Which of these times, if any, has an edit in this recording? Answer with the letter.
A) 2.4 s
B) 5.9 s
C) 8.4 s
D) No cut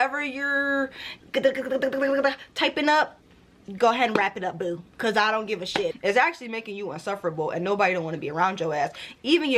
B